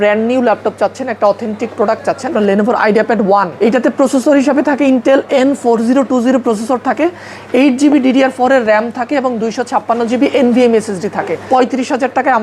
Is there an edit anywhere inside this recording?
yes; 3 cuts; at 2.3 s, 3.5 s, 11.4 s

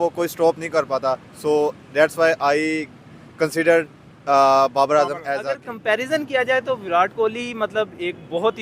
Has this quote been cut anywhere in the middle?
yes; 1 cut; at 5.7 s

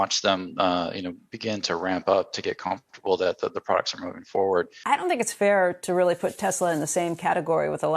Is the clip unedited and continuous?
no; 1 cut; at 4.8 s

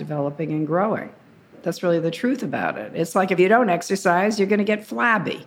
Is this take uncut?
no; 2 cuts; at 1.6 s, 3.4 s

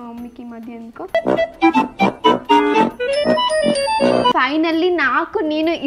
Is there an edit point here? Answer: no; 0 cuts

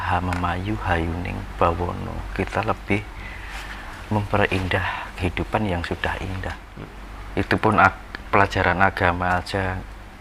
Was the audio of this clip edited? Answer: yes; 1 cut; at 6.7 s

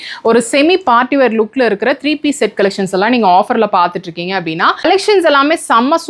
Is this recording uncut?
no; 1 cut; at 4.8 s

